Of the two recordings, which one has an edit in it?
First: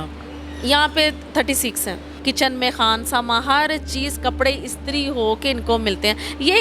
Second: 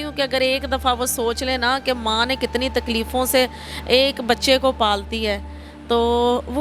first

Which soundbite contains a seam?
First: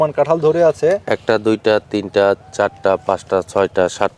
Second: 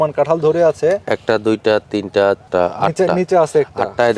second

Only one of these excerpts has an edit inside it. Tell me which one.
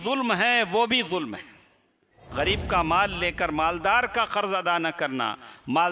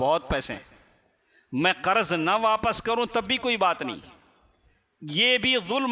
first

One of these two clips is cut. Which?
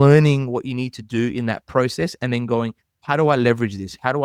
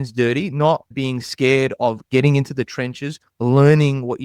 second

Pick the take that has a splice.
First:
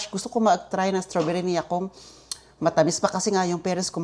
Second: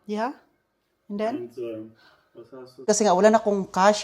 second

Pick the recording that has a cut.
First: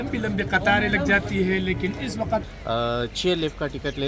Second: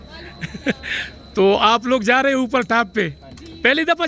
first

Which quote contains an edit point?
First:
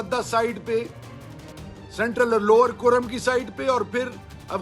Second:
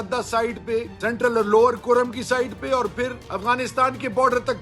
second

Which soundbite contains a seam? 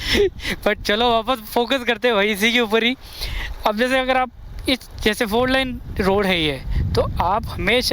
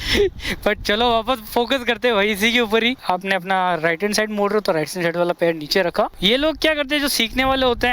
second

